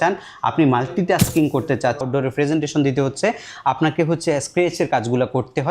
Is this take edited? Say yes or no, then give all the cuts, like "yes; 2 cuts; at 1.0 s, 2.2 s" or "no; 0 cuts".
yes; 1 cut; at 2.0 s